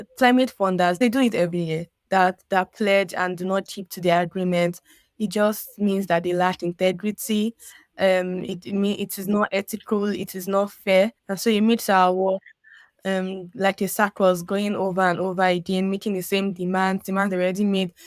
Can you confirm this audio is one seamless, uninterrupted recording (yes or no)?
no